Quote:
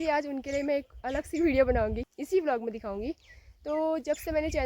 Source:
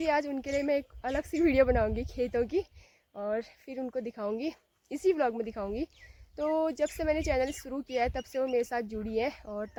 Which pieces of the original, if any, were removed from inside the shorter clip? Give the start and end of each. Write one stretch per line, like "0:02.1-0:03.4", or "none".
0:02.1-0:04.8